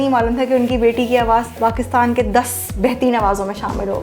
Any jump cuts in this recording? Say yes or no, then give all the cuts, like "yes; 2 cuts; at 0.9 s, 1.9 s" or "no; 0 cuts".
no; 0 cuts